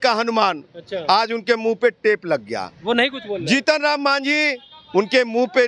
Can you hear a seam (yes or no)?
no